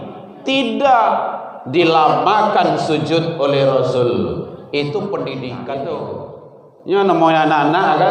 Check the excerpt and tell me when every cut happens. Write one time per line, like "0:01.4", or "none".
0:06.0